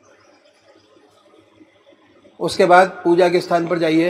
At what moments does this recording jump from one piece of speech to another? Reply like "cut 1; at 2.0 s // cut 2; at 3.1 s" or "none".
cut 1; at 1.5 s

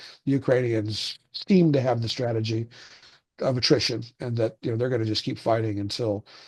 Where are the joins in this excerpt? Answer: none

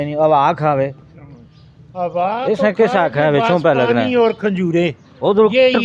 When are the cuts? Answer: none

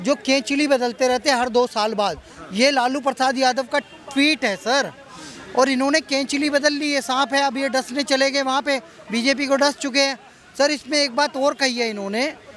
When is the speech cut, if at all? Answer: none

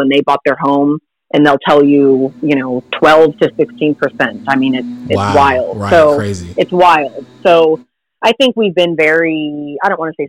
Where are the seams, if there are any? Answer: none

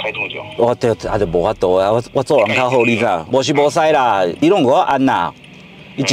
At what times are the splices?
none

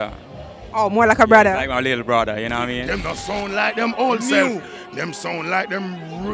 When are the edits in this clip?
cut 1; at 2.9 s

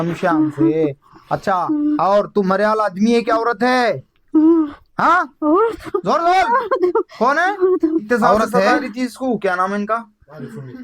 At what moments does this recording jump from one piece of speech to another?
cut 1; at 8.9 s

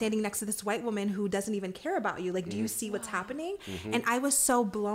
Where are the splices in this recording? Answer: none

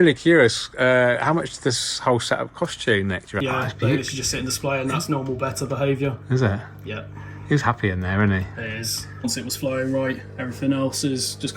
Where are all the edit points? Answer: cut 1; at 3.4 s // cut 2; at 9.2 s

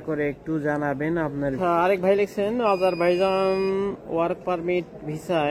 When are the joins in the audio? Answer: cut 1; at 1.6 s

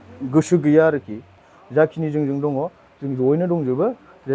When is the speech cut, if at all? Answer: cut 1; at 1.5 s

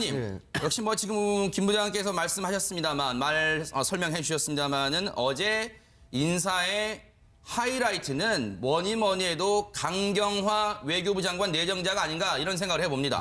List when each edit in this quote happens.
cut 1; at 1.9 s

